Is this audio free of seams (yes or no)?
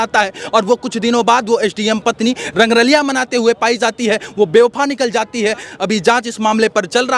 yes